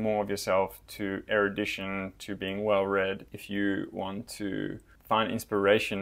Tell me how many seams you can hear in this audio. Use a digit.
2